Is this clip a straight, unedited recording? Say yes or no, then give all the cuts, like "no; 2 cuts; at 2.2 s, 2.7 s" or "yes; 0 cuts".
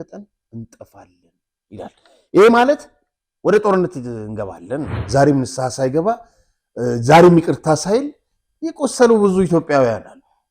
no; 1 cut; at 4.9 s